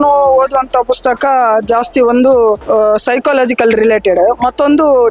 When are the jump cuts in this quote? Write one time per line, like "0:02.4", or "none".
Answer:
0:02.6